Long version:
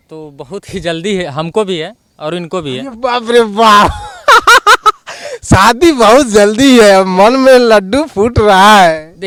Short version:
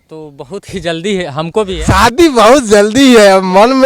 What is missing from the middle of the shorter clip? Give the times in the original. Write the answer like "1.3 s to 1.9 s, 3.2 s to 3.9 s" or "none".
1.8 s to 5.4 s